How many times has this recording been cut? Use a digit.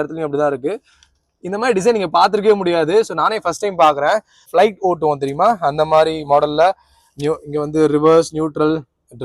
1